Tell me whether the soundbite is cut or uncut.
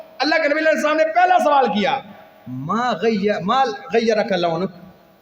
uncut